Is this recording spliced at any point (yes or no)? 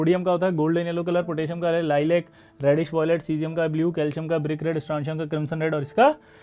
no